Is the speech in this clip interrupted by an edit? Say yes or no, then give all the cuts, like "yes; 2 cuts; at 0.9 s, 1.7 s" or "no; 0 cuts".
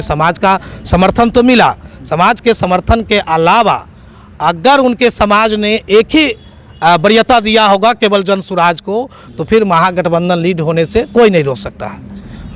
no; 0 cuts